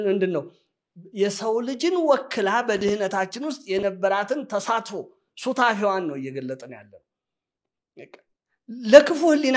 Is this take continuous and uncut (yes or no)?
yes